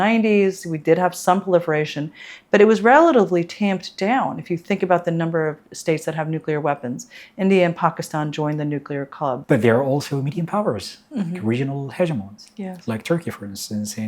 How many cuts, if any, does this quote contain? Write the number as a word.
one